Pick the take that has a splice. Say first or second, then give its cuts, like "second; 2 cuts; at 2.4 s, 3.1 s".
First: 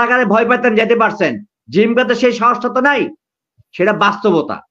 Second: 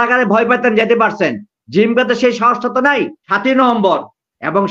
second; 1 cut; at 3.2 s